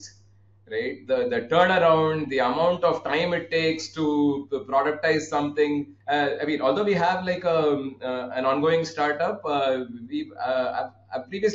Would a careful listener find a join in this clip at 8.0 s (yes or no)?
no